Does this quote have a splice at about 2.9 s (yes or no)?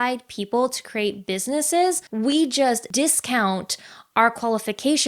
yes